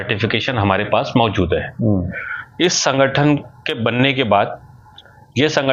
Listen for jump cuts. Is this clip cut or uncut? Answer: uncut